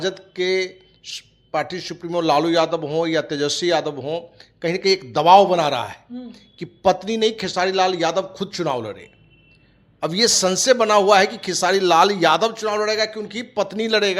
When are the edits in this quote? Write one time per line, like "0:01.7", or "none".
none